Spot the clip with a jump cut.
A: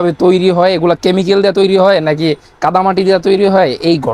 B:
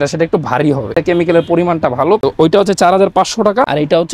B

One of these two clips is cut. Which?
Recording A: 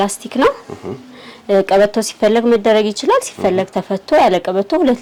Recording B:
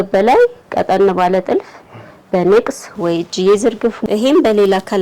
B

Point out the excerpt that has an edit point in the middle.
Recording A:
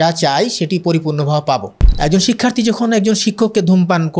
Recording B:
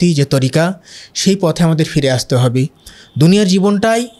A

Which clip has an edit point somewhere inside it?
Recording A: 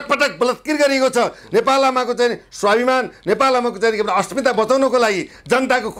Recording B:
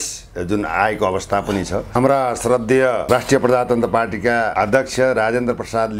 B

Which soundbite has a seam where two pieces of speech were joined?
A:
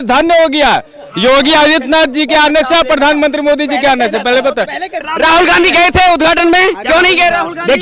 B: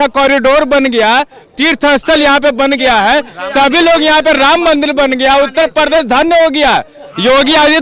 A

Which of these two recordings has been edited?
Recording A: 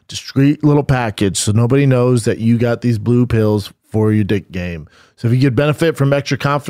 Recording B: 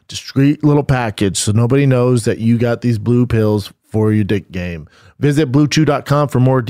B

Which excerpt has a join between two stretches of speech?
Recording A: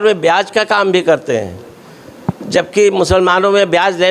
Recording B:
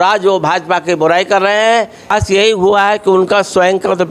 B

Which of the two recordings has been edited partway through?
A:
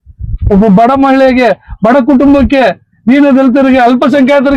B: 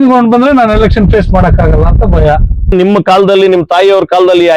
B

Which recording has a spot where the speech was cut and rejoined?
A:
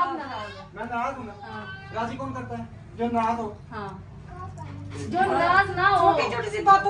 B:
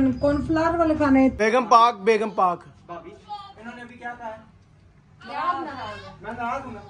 B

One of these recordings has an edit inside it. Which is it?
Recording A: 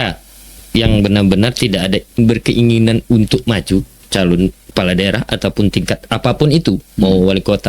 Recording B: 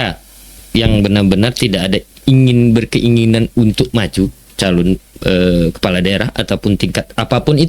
A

